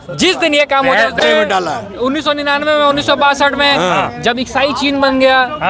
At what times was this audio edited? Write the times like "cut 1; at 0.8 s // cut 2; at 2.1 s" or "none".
cut 1; at 1.2 s